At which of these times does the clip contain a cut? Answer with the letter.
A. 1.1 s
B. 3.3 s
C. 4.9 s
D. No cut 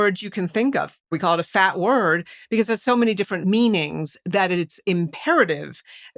A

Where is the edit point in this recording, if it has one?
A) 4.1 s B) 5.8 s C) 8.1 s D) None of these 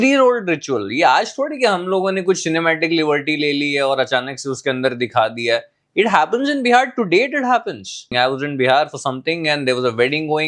C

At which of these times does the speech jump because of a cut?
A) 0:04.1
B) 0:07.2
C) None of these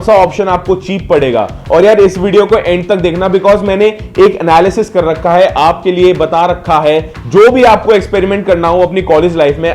B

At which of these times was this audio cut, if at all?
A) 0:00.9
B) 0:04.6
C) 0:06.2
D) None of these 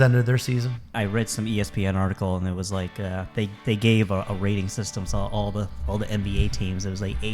A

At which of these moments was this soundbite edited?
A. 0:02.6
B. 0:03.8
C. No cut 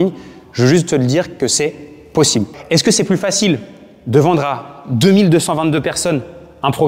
A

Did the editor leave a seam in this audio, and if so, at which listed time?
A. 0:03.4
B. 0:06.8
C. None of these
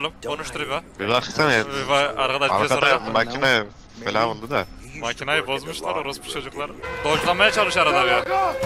B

